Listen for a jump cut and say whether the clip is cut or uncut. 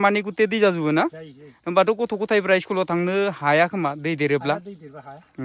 uncut